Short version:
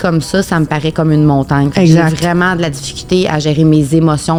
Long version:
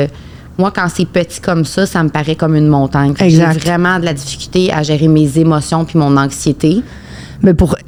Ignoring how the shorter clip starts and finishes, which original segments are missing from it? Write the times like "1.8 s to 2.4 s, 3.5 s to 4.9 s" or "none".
none